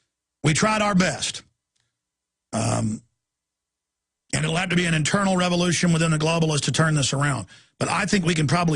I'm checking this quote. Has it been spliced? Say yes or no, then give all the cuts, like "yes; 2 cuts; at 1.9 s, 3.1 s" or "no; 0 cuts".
yes; 1 cut; at 4.2 s